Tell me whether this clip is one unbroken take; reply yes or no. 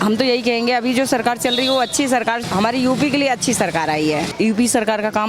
no